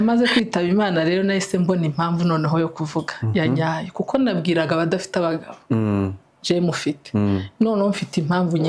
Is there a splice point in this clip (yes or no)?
no